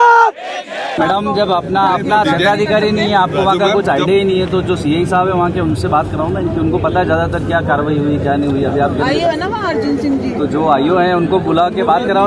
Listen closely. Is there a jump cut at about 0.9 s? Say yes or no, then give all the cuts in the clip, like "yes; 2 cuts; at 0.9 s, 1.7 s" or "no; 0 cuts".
yes; 1 cut; at 0.9 s